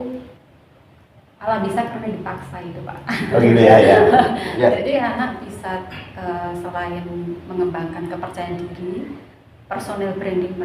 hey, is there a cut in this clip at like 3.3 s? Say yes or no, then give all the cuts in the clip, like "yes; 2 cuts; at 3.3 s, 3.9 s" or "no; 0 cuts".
no; 1 cut; at 4.8 s